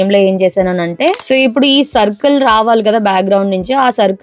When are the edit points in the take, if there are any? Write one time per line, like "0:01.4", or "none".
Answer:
0:01.2